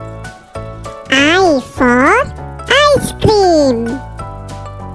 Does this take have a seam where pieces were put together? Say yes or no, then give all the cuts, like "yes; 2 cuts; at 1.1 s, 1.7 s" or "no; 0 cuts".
yes; 1 cut; at 0.9 s